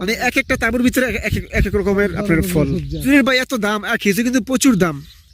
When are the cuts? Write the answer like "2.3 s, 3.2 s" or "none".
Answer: 3.0 s

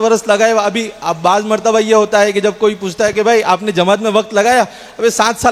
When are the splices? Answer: none

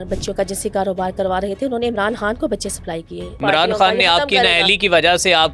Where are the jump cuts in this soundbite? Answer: 3.4 s

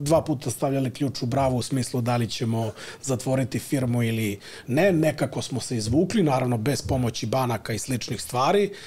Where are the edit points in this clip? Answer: none

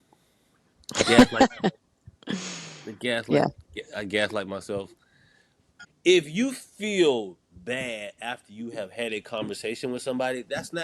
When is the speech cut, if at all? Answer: 5.6 s

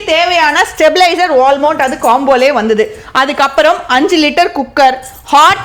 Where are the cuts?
none

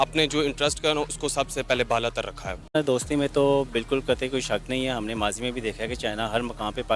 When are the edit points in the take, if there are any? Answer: 2.7 s

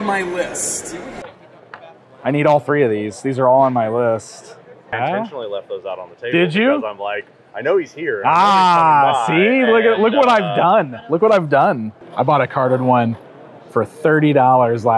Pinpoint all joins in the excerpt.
1.2 s, 4.9 s, 12.0 s

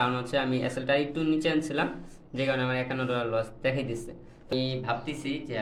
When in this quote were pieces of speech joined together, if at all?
4.5 s

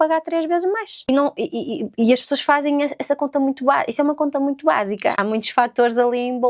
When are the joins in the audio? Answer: 1.1 s, 5.2 s

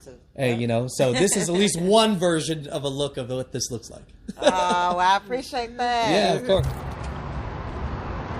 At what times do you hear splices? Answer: 6.6 s

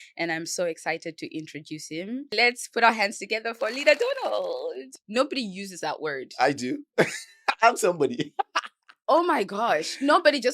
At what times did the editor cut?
2.3 s, 4.9 s

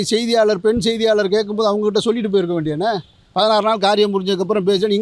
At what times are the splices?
none

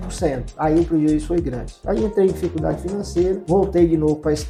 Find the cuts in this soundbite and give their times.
none

